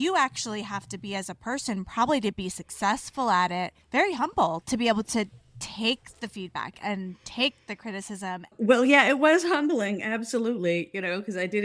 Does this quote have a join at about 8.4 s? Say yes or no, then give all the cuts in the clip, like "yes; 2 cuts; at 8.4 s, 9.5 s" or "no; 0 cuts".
yes; 2 cuts; at 3.8 s, 8.4 s